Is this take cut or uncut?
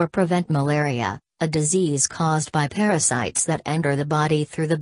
uncut